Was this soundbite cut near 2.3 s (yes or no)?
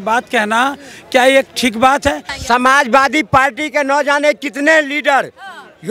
yes